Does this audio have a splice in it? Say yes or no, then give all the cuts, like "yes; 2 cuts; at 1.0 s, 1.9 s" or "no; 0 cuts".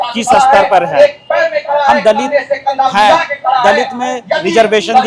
no; 0 cuts